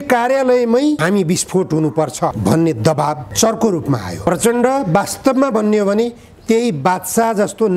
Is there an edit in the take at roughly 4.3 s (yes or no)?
yes